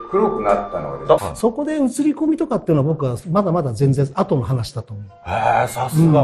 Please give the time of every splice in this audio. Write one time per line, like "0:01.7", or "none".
0:01.3